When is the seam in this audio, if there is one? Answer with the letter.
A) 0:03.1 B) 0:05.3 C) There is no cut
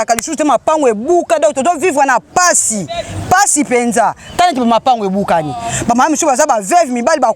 C